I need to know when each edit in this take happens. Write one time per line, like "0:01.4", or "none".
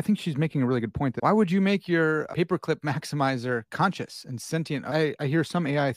0:01.2
0:02.3
0:03.7
0:04.9